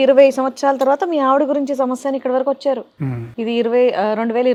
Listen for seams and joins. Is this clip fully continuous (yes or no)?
yes